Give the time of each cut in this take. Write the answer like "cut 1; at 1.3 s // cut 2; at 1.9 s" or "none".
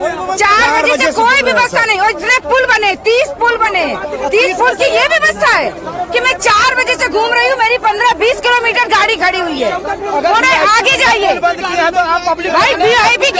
none